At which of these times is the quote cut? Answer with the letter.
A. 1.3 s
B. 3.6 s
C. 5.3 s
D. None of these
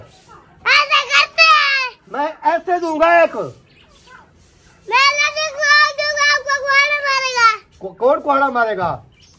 D